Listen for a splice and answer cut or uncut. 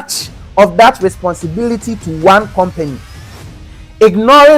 uncut